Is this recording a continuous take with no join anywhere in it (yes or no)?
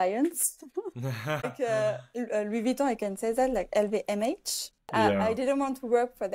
no